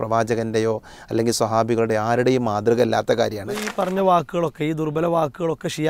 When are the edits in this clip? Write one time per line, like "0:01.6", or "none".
0:03.7